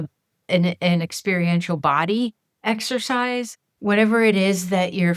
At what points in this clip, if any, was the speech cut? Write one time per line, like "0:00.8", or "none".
0:02.5
0:03.6